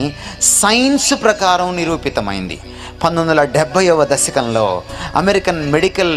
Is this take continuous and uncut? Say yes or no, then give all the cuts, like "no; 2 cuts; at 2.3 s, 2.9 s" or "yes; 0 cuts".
yes; 0 cuts